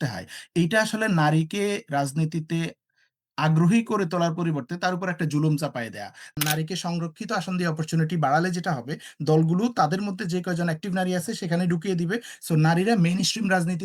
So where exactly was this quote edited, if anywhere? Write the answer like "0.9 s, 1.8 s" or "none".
6.3 s